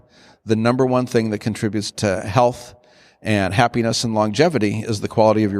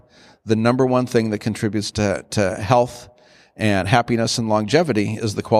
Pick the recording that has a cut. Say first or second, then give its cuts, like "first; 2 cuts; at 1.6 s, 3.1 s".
first; 1 cut; at 1.9 s